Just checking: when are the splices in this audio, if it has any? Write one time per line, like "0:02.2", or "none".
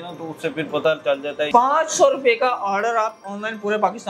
0:01.5